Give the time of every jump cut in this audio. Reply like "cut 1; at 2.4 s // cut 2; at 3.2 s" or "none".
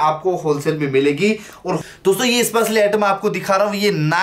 cut 1; at 1.8 s